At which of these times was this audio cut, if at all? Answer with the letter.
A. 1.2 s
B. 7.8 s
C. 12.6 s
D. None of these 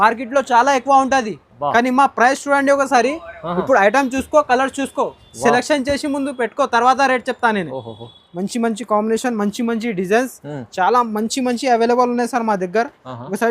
B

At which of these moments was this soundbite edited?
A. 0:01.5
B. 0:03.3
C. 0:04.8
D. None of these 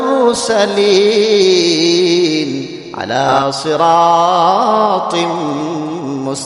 B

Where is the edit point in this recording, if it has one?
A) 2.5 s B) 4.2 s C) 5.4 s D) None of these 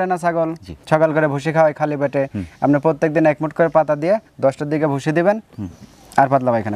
D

